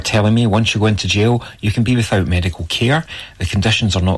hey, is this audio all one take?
yes; 0 cuts

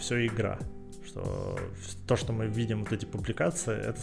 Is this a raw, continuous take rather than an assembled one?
yes; 0 cuts

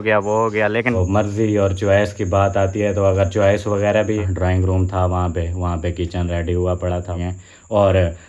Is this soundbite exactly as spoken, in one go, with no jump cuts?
no; 3 cuts; at 1.0 s, 4.2 s, 7.2 s

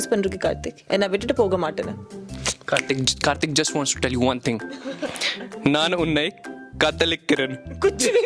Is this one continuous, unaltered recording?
yes; 0 cuts

